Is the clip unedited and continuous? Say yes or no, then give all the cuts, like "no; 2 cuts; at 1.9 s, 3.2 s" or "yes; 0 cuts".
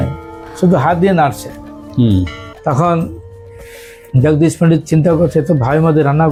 yes; 0 cuts